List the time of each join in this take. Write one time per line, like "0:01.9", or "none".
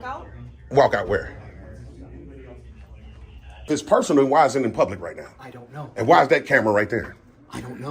0:03.7